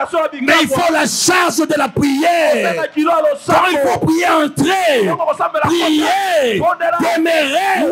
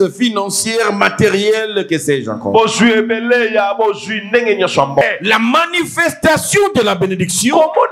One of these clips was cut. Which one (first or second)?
second